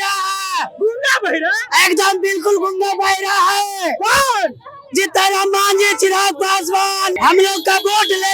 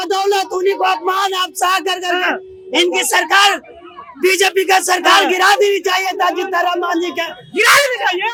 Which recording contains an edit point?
first; 1 cut; at 7.1 s

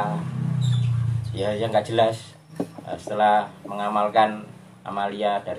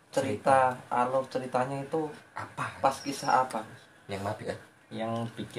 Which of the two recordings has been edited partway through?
second; 1 cut; at 4.4 s

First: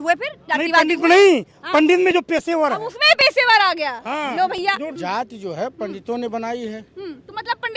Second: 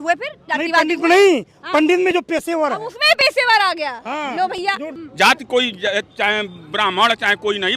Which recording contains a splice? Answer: second; 1 cut; at 5.0 s

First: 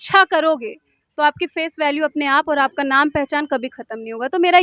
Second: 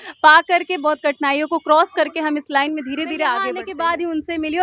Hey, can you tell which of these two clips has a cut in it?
second; 1 cut; at 3.7 s

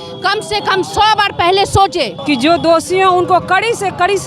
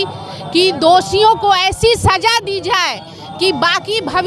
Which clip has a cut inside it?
first; 1 cut; at 2.1 s

